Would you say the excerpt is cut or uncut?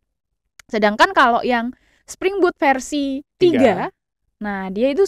cut